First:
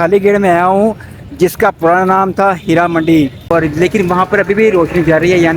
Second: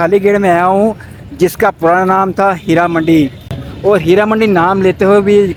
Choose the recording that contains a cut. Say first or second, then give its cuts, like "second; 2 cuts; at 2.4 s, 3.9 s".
first; 1 cut; at 3.5 s